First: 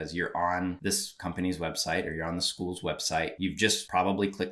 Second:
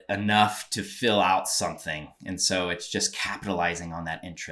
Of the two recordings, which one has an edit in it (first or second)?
first